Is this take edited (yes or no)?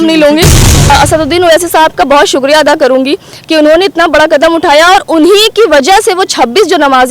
yes